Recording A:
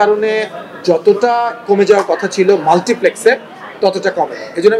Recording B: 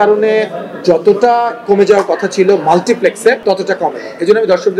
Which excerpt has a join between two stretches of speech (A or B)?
B